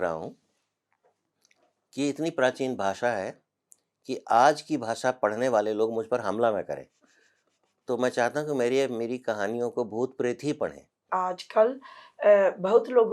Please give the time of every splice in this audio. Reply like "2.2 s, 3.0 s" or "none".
11.0 s